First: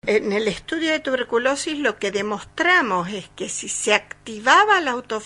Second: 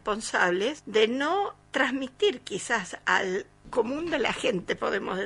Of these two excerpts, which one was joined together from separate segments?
second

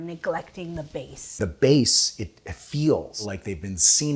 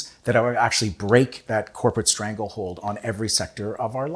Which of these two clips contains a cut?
first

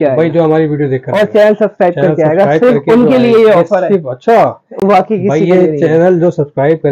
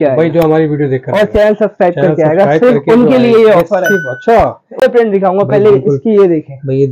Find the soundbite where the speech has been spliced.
second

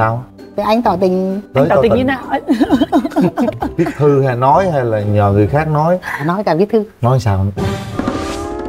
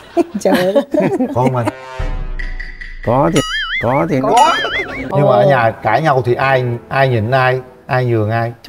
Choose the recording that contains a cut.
second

